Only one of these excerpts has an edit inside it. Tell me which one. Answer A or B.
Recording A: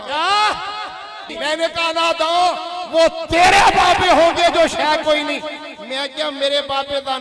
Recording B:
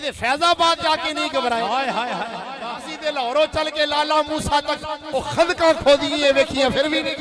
A